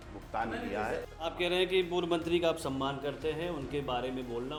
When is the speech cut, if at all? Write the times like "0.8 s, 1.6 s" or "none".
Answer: none

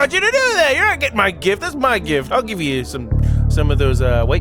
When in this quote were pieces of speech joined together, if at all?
2.3 s

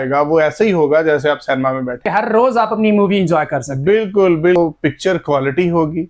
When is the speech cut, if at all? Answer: 2.1 s, 4.6 s

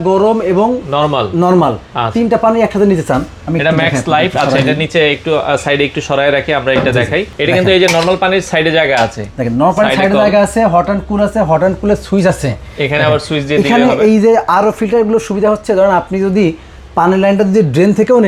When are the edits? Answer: none

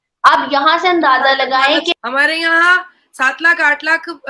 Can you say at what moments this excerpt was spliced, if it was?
2.0 s

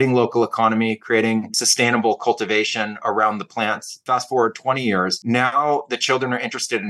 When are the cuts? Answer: 1.6 s, 4.0 s, 5.2 s

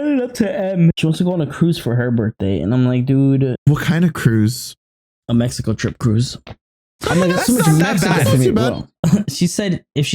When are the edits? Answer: 1.0 s, 3.5 s, 8.9 s

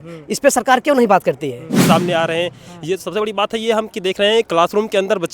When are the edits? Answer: 1.8 s

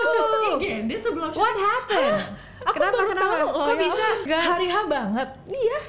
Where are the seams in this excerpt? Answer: 4.2 s

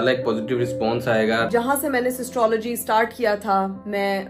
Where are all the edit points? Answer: 1.5 s

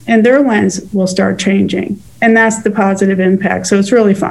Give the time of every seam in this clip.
2.0 s

